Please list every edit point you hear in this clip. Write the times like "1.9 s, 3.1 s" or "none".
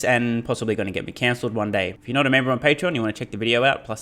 2.0 s